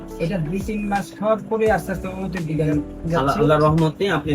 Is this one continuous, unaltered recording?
yes; 0 cuts

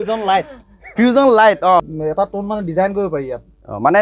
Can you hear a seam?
yes; 1 cut; at 1.8 s

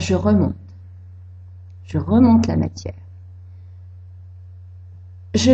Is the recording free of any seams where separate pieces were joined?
yes; 0 cuts

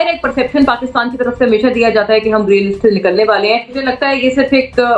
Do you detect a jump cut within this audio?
yes; 1 cut; at 3.8 s

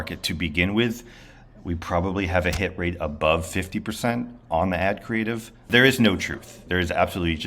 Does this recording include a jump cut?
yes; 1 cut; at 5.7 s

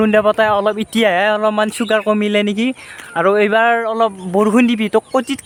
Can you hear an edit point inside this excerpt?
no; 0 cuts

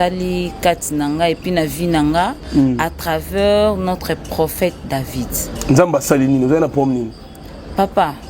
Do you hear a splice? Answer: no; 0 cuts

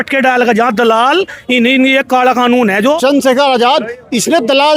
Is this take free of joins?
no; 1 cut; at 3.0 s

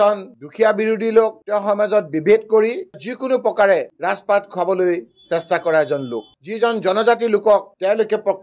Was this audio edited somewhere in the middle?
yes; 1 cut; at 6.4 s

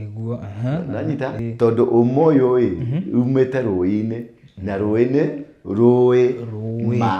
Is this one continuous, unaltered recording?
no; 1 cut; at 1.4 s

